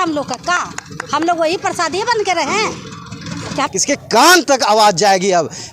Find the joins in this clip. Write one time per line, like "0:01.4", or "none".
0:03.7